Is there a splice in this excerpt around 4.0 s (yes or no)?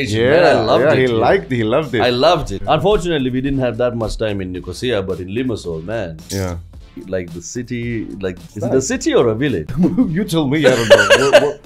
no